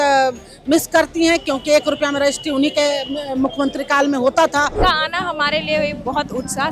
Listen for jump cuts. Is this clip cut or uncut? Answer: cut